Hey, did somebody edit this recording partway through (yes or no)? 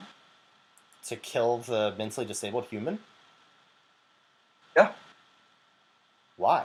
no